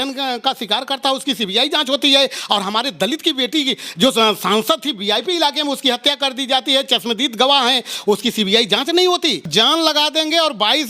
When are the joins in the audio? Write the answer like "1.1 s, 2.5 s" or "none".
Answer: 9.5 s